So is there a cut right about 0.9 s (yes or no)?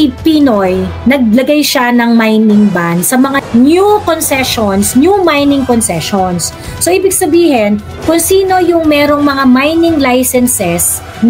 yes